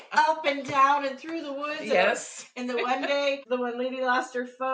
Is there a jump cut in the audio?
yes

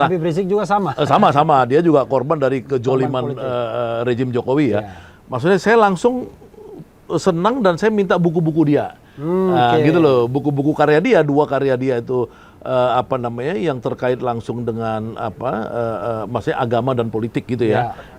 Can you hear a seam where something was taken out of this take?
no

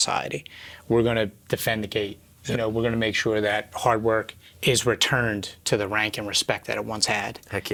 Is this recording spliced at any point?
no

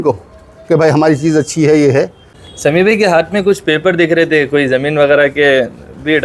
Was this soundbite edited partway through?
yes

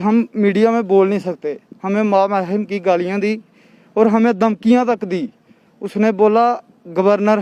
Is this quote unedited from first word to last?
yes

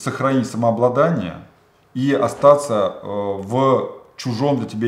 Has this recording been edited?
no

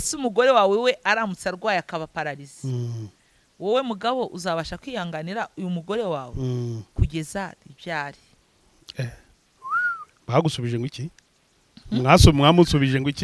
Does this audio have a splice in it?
no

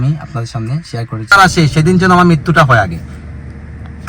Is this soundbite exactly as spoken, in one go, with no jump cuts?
no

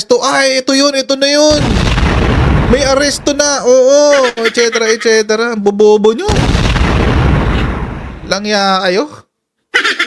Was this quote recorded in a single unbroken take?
yes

